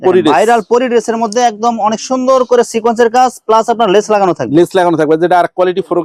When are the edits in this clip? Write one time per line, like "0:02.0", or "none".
none